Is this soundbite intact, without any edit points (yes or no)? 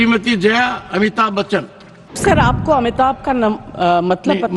no